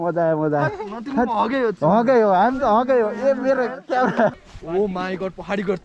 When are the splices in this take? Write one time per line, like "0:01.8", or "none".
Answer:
0:04.4